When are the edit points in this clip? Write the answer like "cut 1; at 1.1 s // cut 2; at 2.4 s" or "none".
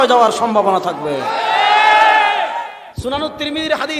cut 1; at 2.8 s